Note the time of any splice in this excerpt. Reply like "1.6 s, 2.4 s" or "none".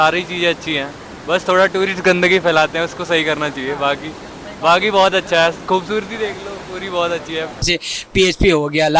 7.6 s